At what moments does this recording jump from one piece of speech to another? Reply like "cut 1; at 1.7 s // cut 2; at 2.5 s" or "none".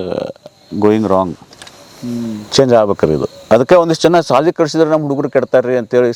none